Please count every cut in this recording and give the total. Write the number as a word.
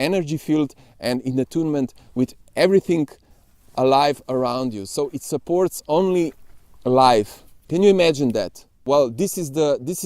one